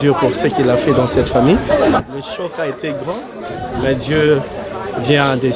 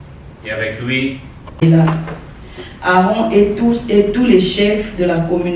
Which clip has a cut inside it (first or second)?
second